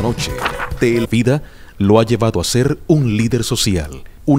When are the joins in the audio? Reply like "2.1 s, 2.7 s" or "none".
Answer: none